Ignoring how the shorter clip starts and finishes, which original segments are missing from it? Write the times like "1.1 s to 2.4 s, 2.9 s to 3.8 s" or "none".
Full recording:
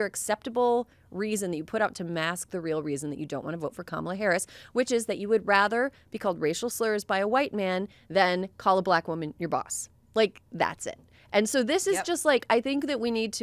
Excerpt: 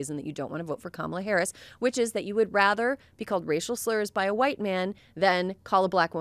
none